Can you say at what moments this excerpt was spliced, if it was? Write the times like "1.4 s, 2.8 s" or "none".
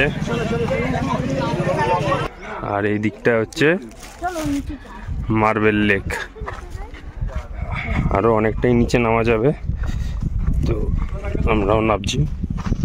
2.2 s